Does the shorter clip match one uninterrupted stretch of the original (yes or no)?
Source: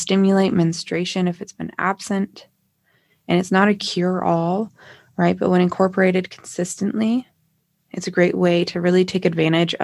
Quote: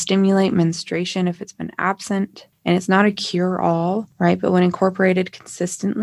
no